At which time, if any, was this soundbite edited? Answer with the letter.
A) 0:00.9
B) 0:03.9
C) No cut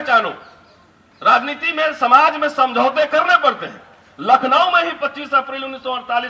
C